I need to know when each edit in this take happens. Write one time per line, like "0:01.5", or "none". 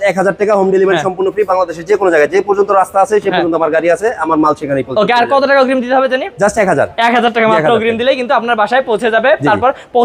none

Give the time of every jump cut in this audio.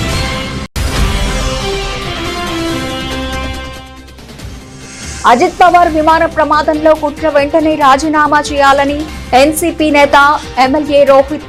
none

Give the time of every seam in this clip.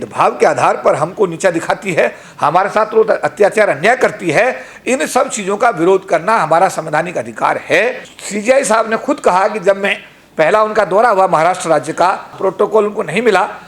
0:08.1
0:12.3

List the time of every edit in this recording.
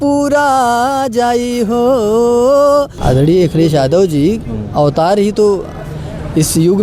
0:03.0

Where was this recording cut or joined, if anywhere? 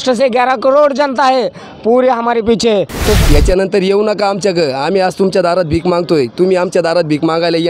0:03.2

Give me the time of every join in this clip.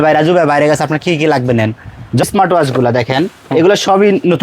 0:02.2

